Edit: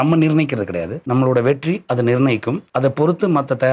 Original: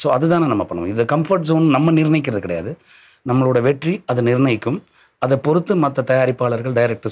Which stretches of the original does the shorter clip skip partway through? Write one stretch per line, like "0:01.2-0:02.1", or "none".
0:02.7-0:03.1
0:04.8-0:05.1

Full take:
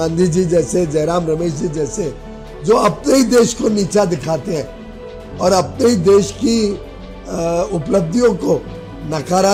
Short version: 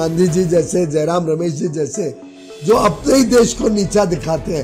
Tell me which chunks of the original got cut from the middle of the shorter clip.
none

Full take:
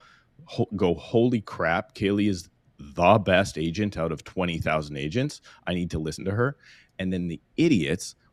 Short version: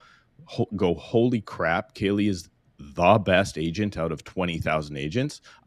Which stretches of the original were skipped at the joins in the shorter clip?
none

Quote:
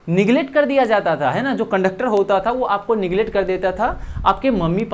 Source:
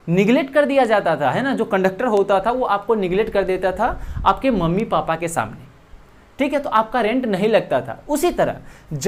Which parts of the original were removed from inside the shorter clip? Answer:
none

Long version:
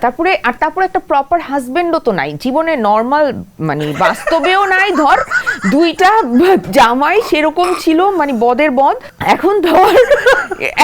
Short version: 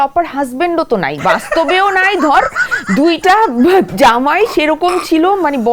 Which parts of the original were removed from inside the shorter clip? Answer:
0:02.3-0:03.9

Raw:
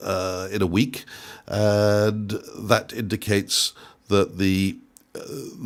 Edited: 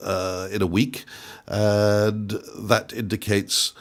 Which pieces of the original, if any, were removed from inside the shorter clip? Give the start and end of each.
none

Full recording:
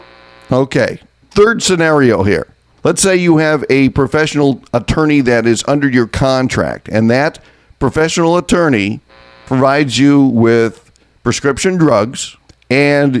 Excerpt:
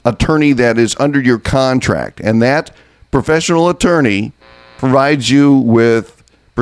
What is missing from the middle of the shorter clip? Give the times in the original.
none

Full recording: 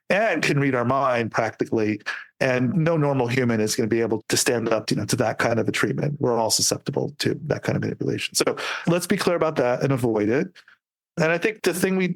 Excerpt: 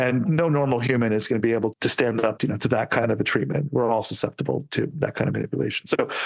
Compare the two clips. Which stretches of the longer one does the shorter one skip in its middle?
none

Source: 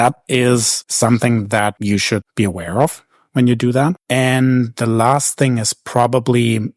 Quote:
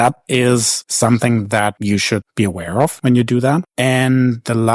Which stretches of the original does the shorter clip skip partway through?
0:03.0-0:03.3

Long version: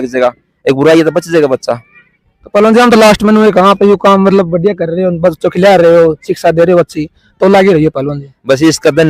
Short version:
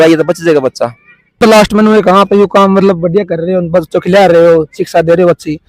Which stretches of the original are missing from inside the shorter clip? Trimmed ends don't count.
0:02.3-0:02.9

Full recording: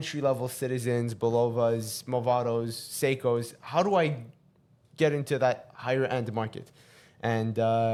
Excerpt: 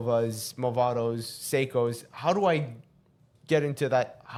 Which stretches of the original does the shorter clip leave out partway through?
none

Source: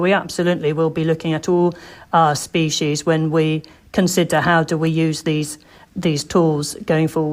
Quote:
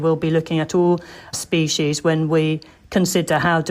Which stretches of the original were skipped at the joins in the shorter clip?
0:02.1-0:02.4

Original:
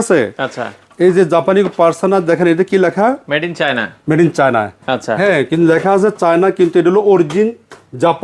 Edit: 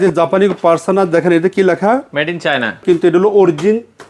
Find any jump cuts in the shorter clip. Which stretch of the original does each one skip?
0:04.0-0:06.5

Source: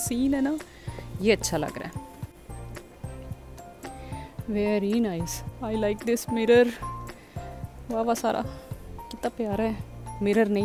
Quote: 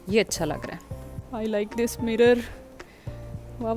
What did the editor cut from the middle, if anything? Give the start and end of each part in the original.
0:02.3-0:05.4

